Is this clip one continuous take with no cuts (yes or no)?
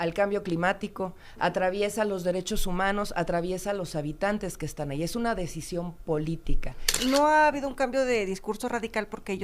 no